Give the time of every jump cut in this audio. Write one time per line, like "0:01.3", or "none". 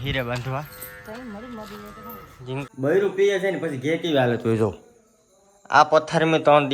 0:02.7